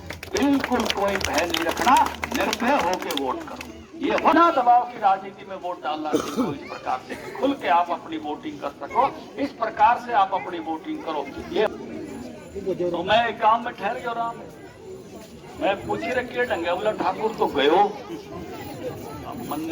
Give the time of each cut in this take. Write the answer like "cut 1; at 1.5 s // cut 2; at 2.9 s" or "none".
cut 1; at 4.3 s // cut 2; at 11.7 s